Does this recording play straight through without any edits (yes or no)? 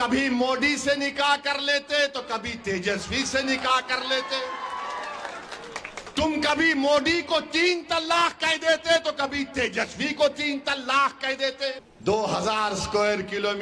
no